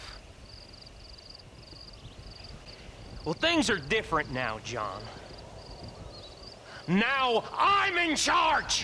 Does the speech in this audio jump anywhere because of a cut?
yes; 1 cut; at 2.7 s

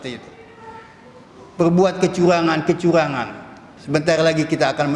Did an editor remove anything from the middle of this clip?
yes; 1 cut; at 3.7 s

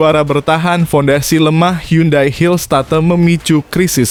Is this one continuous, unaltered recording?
yes; 0 cuts

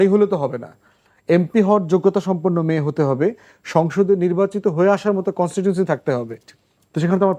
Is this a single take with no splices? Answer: yes; 0 cuts

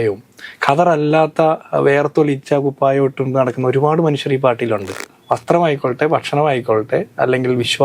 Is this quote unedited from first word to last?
no; 1 cut; at 5.0 s

